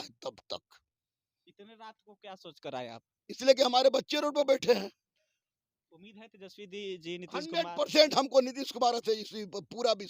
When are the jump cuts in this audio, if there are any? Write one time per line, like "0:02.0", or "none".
none